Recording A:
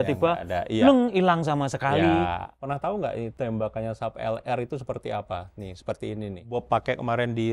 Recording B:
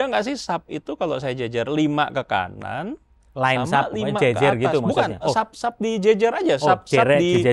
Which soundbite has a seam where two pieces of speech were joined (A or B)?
A